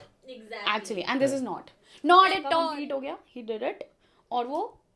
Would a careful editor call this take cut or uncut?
cut